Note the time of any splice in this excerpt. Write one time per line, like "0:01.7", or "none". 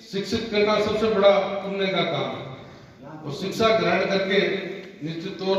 none